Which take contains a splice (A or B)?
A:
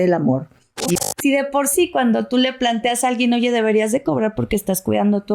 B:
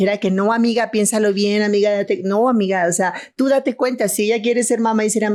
A